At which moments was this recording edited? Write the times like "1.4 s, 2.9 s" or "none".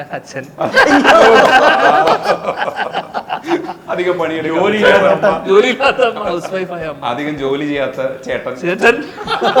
none